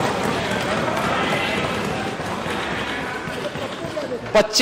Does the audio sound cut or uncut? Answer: uncut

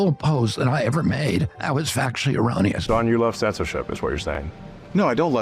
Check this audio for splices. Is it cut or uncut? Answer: cut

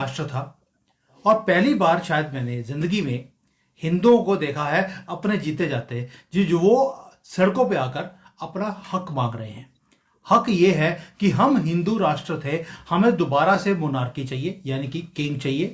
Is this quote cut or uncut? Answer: uncut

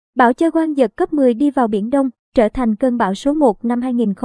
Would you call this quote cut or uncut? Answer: uncut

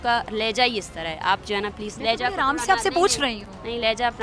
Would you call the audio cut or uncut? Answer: uncut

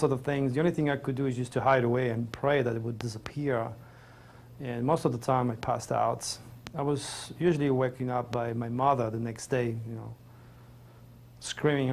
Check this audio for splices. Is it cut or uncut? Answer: uncut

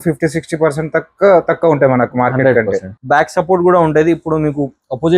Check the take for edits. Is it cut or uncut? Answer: cut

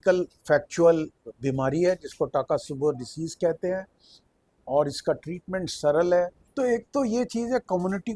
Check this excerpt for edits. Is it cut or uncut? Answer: cut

